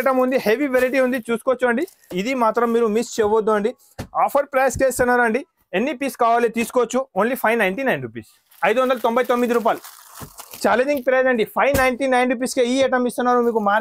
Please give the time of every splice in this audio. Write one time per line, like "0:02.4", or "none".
0:02.1